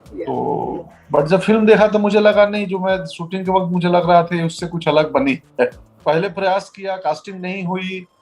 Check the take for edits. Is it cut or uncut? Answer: cut